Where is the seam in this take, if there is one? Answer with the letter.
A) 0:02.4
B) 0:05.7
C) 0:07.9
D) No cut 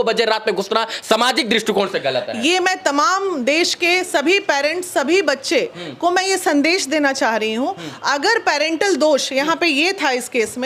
D